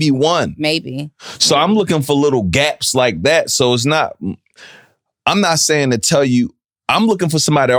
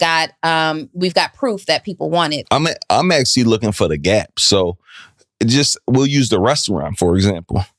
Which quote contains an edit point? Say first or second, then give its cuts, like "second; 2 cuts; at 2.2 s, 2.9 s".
second; 1 cut; at 2.4 s